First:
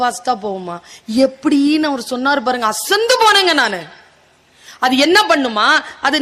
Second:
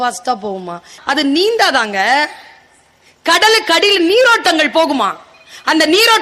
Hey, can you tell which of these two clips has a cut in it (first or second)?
second